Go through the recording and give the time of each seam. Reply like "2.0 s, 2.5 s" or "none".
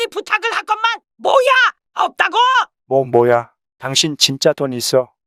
none